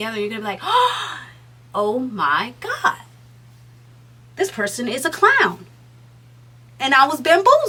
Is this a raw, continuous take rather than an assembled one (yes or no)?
yes